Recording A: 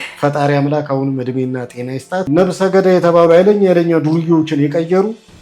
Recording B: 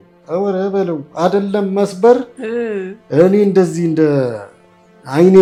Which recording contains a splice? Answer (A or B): A